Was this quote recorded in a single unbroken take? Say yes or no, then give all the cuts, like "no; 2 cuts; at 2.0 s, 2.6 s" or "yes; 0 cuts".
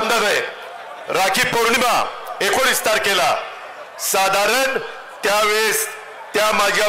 yes; 0 cuts